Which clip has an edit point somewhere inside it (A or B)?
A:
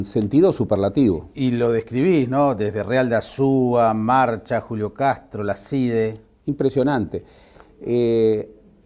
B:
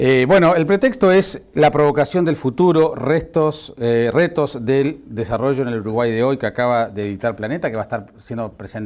A